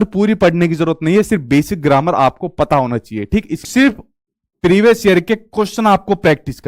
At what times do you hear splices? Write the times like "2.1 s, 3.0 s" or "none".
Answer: 3.5 s